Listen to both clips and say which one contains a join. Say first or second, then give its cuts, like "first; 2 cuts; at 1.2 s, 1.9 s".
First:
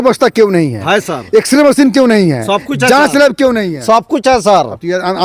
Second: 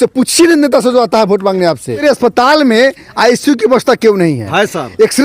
second; 1 cut; at 2.0 s